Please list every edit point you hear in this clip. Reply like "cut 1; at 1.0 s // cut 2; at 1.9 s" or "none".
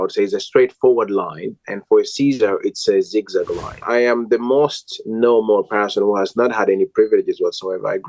cut 1; at 3.8 s